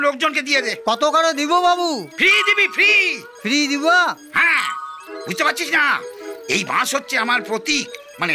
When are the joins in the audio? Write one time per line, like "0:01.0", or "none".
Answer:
none